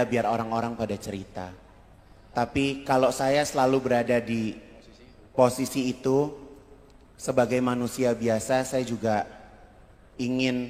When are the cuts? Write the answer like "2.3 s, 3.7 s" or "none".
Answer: none